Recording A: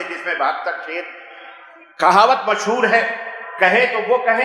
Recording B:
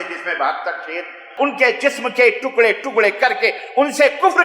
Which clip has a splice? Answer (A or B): B